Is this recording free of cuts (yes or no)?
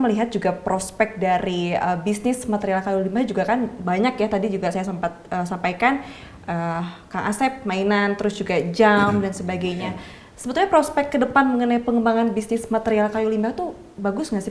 yes